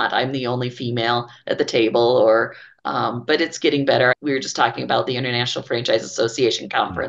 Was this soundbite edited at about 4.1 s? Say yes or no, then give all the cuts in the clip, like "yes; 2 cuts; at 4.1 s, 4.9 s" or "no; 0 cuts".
yes; 1 cut; at 4.1 s